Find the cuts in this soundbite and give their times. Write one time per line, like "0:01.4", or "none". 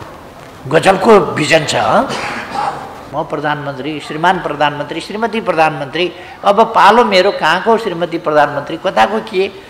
0:03.1